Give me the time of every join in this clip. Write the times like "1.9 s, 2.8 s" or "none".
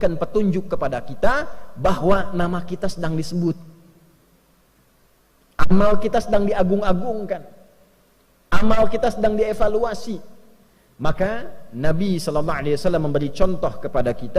none

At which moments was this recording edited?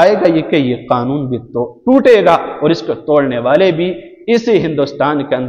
none

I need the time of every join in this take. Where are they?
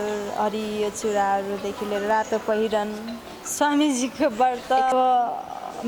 4.9 s

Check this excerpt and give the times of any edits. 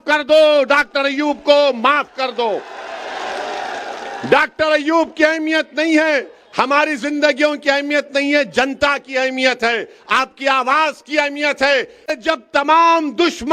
12.1 s

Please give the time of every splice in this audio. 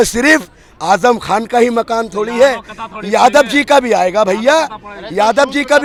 none

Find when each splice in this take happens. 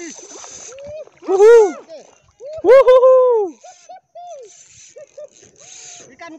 1.6 s

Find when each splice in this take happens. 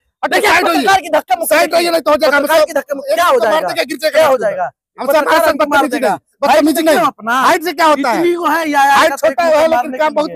none

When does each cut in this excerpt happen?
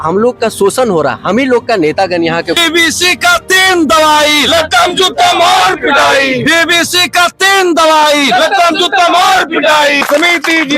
2.5 s, 10.0 s

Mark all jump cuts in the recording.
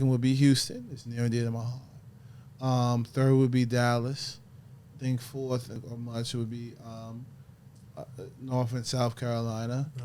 5.8 s

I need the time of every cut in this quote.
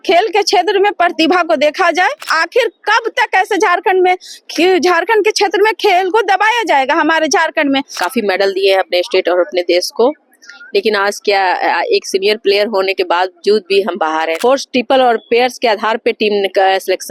2.3 s, 7.9 s, 14.4 s

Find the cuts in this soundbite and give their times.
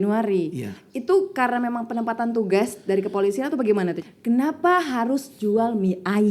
4.0 s

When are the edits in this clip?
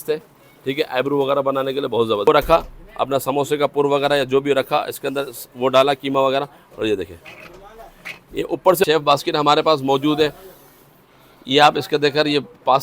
2.3 s, 8.8 s

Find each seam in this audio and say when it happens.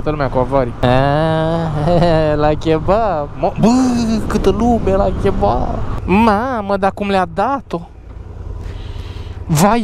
5.9 s

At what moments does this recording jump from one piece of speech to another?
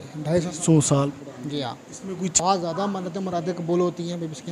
2.4 s

